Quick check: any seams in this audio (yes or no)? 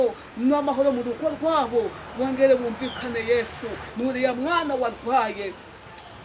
yes